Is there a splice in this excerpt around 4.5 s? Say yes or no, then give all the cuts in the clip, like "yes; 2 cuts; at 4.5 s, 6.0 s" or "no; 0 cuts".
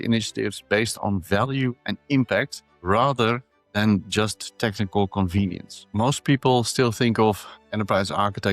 no; 1 cut; at 5.9 s